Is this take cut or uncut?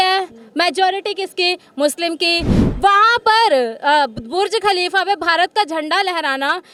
uncut